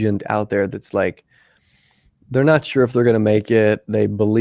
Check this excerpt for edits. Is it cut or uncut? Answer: uncut